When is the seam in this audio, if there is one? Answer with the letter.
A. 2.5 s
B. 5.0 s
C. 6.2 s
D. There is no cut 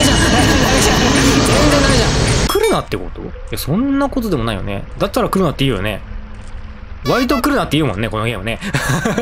A